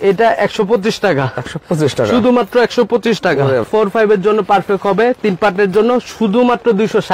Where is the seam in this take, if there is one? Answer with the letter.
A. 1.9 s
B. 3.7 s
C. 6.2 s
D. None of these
B